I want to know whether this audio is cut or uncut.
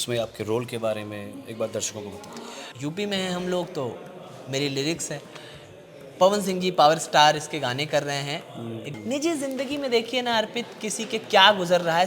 cut